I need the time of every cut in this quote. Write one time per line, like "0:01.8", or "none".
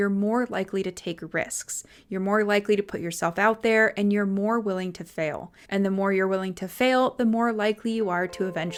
none